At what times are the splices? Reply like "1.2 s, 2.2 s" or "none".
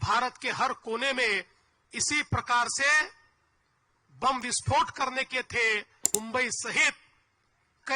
6.1 s